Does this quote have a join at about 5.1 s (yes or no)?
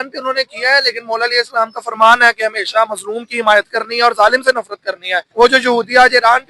yes